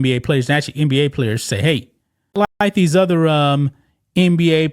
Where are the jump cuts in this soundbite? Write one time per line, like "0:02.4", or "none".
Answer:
0:02.6